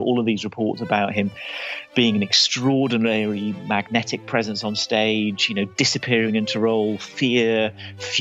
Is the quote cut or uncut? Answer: uncut